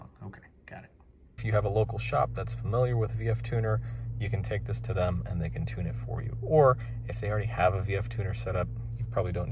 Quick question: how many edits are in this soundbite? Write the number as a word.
one